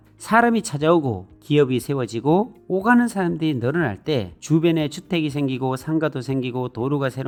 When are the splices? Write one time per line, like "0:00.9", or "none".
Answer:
none